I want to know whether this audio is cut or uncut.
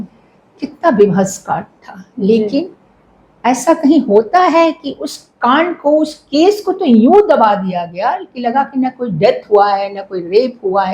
uncut